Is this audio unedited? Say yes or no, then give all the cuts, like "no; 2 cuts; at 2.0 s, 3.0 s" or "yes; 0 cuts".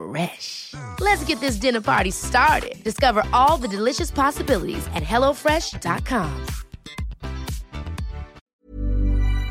no; 1 cut; at 8.4 s